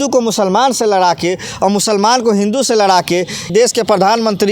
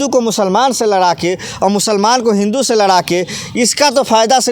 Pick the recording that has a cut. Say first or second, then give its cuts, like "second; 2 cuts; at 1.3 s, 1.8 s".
first; 1 cut; at 3.5 s